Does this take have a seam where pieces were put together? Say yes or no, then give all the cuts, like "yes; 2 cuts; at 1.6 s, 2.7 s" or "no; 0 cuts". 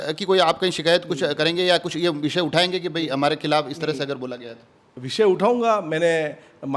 no; 0 cuts